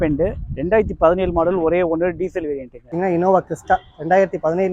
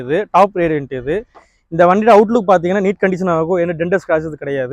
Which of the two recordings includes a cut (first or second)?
first